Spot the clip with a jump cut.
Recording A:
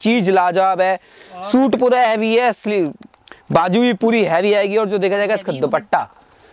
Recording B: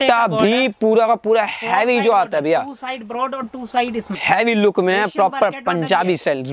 B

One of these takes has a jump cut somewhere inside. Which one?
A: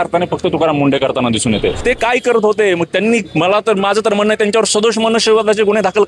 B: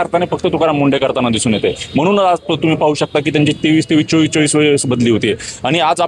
A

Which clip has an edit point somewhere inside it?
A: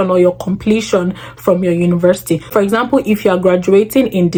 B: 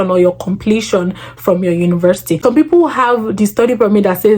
B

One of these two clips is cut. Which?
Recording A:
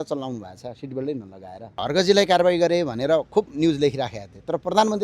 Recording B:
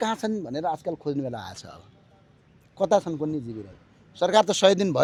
A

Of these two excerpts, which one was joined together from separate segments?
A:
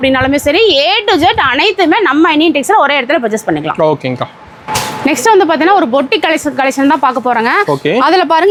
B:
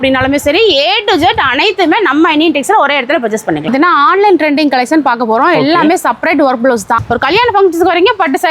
B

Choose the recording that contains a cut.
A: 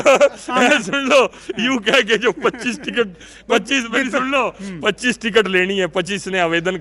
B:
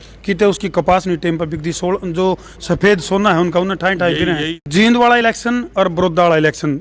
B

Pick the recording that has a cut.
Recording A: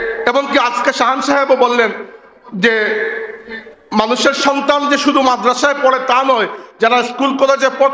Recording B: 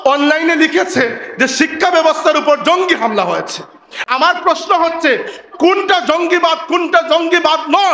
B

